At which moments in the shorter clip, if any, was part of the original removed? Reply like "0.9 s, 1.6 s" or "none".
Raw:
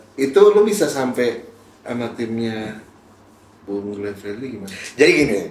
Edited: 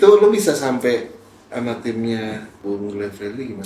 2.5 s